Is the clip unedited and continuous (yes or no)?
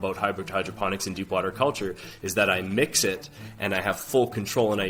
yes